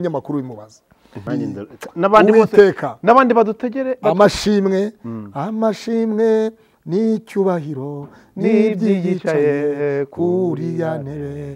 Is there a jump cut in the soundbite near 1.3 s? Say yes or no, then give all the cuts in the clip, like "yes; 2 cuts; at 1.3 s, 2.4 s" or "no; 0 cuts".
yes; 1 cut; at 1.3 s